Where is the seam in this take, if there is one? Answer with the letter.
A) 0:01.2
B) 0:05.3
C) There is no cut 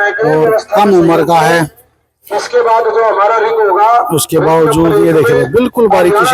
C